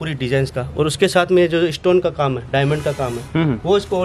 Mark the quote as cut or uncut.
uncut